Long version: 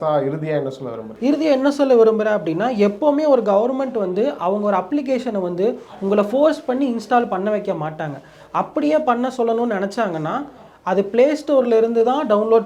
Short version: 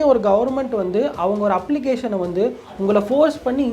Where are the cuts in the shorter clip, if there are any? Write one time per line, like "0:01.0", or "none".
none